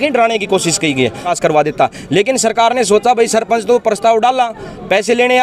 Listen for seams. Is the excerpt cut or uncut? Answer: cut